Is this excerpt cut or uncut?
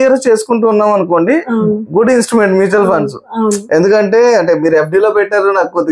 uncut